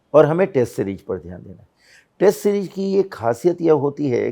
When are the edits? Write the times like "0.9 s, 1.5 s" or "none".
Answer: none